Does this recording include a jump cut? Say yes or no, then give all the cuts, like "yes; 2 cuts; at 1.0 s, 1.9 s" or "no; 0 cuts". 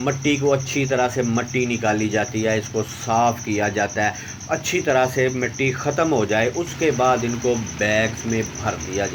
no; 0 cuts